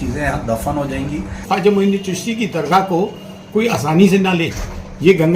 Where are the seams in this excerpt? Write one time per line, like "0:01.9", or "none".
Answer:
0:01.4

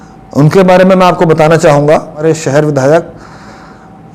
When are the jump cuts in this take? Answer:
0:02.2

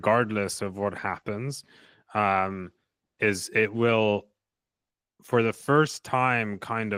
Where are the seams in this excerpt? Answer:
none

